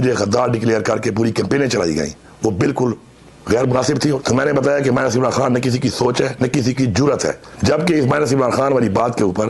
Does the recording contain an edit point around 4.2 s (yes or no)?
yes